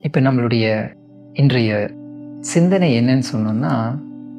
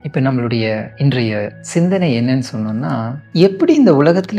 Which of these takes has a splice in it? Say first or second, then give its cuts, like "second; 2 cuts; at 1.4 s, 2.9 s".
second; 2 cuts; at 1.2 s, 3.2 s